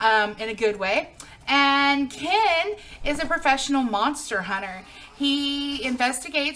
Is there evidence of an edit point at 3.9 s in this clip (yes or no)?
no